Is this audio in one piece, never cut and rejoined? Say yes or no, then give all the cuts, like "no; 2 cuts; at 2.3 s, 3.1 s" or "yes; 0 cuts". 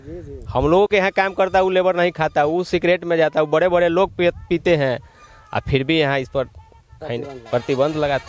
yes; 0 cuts